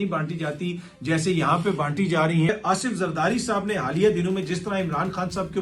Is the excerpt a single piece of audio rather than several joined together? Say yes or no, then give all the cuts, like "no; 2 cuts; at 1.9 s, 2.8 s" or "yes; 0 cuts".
no; 1 cut; at 2.5 s